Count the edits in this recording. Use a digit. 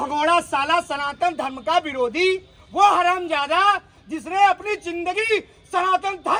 0